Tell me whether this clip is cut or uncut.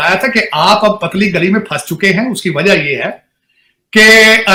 uncut